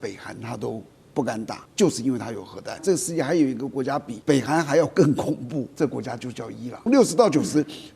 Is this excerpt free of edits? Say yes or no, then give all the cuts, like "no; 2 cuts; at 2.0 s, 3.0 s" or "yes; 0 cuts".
no; 5 cuts; at 1.6 s, 2.8 s, 4.1 s, 5.7 s, 6.9 s